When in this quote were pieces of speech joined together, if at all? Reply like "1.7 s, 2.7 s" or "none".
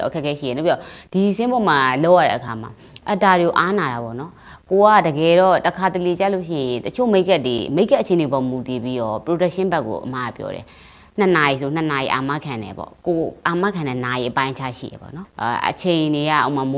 15.2 s